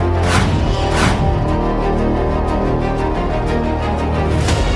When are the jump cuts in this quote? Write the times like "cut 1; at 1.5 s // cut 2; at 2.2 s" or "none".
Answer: cut 1; at 2.2 s